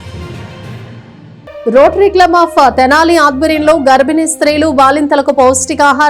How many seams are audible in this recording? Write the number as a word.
one